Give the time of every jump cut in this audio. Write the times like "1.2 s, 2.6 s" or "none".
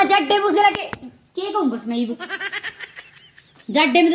none